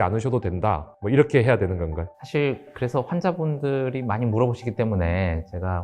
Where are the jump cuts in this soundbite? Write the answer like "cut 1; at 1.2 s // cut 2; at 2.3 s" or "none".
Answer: cut 1; at 0.9 s // cut 2; at 2.1 s